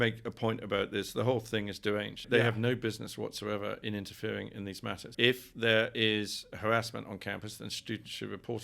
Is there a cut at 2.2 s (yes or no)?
yes